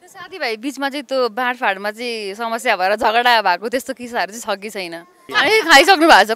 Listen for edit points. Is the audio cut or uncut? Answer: cut